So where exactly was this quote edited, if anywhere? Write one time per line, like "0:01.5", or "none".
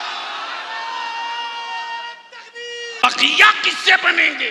0:03.0